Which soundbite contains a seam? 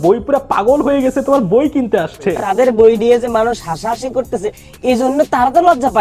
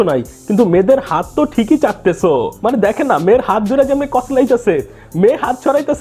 first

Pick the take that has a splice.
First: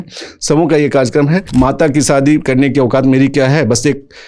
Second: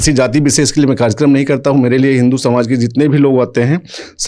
first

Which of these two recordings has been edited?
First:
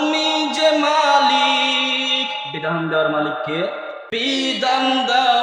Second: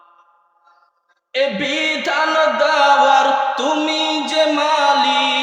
first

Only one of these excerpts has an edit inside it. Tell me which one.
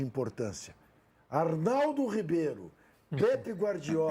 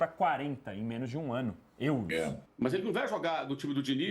second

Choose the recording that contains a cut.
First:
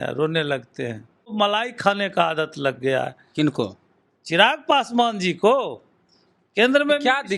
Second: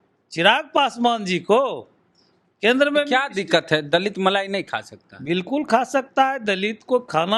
first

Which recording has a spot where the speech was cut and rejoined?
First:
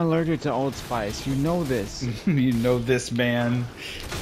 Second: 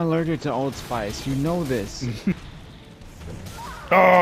second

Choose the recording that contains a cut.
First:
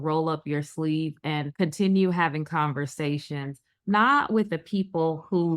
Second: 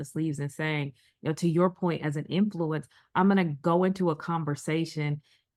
first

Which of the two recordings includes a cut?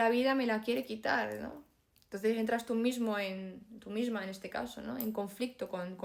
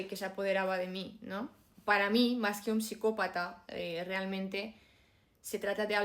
second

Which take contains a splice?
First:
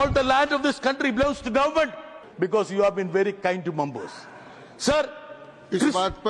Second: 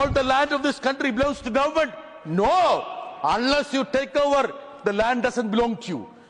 first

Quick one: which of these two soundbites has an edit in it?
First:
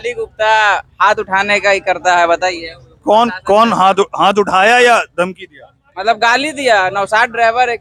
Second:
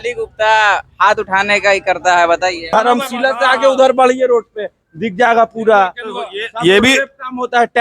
second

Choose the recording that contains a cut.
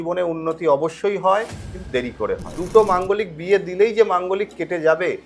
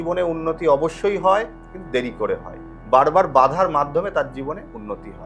first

